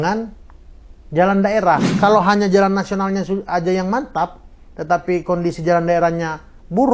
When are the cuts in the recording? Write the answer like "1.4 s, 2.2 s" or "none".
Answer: 1.9 s